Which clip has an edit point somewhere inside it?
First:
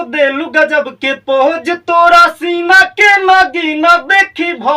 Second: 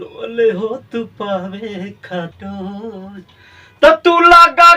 second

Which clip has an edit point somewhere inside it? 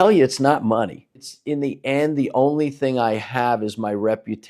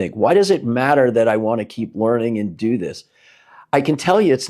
first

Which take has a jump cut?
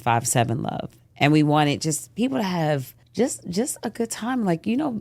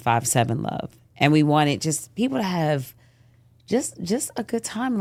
first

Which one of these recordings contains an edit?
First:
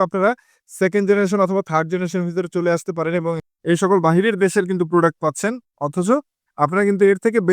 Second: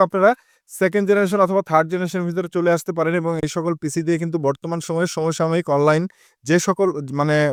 first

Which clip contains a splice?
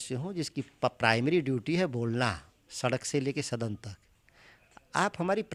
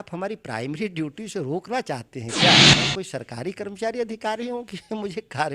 second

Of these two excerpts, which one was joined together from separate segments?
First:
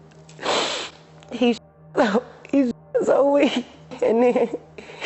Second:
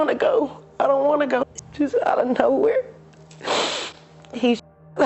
second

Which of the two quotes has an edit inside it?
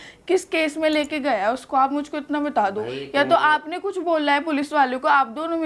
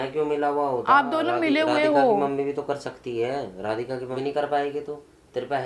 second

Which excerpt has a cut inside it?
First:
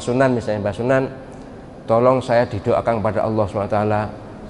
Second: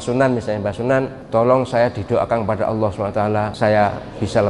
second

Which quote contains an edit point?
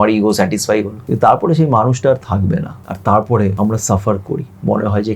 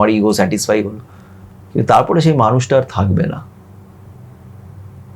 first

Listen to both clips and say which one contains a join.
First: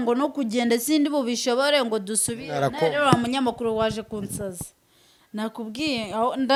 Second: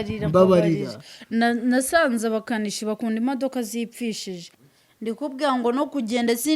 second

